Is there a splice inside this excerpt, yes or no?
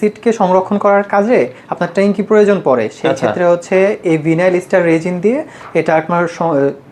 no